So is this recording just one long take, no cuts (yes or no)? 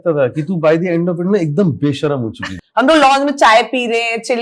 no